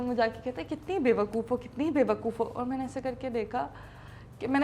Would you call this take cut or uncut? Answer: uncut